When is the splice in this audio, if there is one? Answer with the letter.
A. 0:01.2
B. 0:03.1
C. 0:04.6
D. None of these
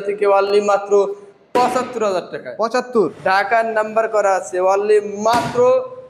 B